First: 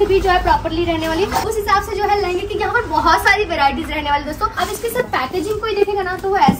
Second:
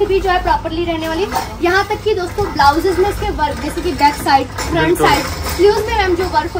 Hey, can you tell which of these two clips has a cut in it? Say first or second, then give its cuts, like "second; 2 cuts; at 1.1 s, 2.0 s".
first; 2 cuts; at 1.5 s, 4.5 s